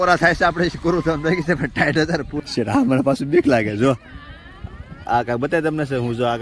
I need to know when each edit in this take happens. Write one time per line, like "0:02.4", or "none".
0:02.4